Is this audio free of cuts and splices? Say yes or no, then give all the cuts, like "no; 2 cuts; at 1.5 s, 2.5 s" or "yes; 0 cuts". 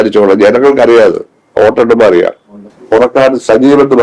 no; 1 cut; at 2.7 s